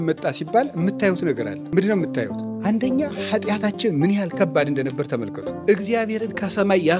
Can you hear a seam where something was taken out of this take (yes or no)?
yes